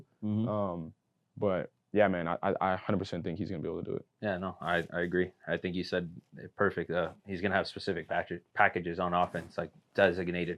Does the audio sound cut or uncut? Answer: uncut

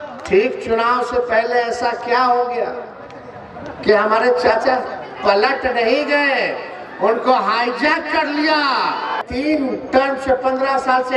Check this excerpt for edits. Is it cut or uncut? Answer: cut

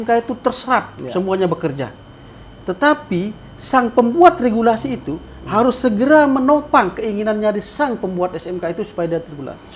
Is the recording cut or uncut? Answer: uncut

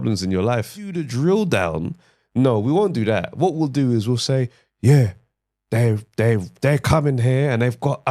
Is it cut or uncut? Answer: cut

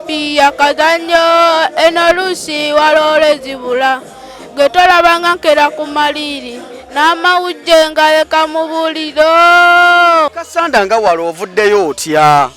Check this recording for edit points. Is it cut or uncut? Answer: cut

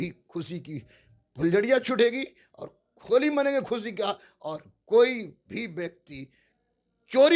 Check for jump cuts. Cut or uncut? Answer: uncut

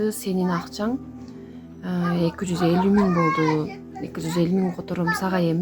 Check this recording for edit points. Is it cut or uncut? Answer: uncut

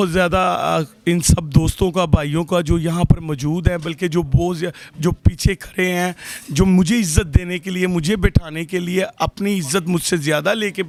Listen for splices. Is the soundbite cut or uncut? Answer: uncut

